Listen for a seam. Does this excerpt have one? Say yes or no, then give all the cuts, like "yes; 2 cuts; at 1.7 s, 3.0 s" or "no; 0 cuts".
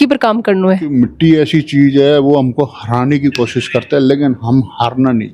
yes; 1 cut; at 0.9 s